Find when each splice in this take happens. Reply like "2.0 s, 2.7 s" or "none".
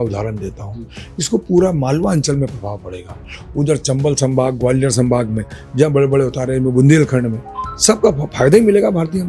none